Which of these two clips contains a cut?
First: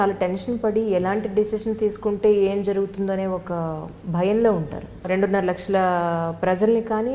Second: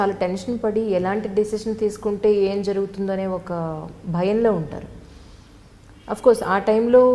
first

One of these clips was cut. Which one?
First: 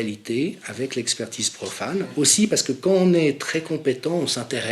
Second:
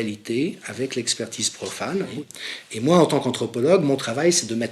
second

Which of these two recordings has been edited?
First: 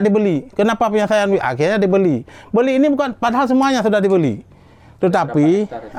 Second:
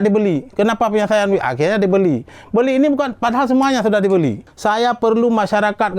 second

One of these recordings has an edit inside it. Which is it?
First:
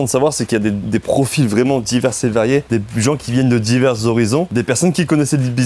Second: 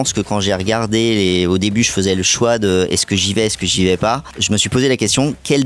first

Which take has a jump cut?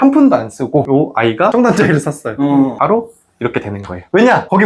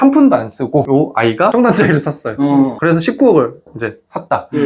first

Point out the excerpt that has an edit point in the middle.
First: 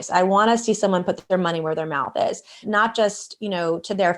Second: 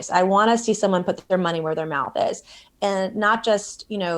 first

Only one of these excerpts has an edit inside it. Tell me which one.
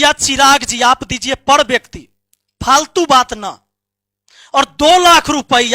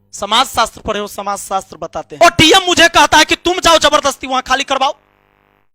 second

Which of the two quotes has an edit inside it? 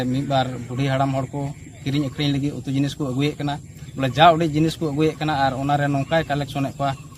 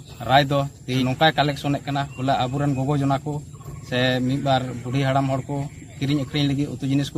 second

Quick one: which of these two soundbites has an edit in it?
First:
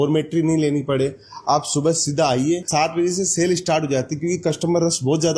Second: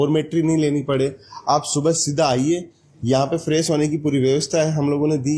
first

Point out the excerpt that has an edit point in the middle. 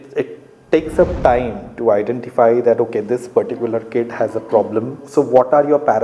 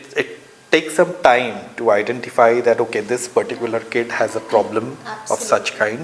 first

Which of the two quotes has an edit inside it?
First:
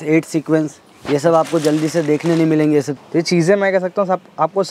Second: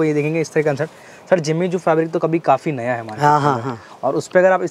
first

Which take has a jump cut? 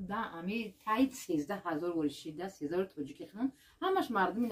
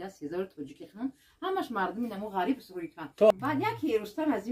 second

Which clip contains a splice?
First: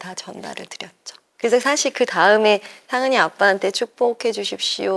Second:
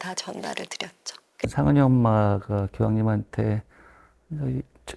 second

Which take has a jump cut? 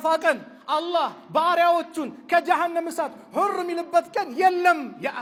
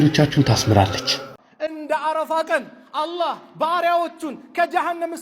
second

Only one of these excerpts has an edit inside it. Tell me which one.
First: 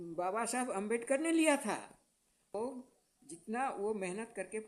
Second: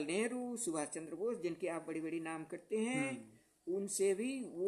first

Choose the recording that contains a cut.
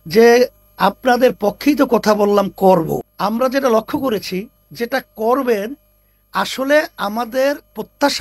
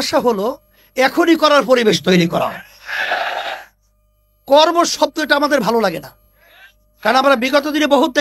first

